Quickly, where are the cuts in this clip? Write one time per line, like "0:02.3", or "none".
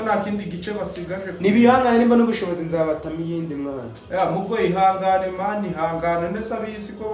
none